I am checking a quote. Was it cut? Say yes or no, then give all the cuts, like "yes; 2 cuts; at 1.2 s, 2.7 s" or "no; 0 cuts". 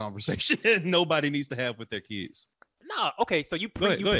yes; 1 cut; at 2.8 s